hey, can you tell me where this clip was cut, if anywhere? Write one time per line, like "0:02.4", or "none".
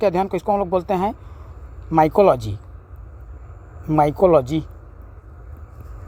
none